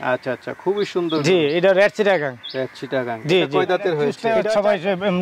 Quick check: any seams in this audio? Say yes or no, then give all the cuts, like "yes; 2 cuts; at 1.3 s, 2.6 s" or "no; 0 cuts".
yes; 1 cut; at 4.2 s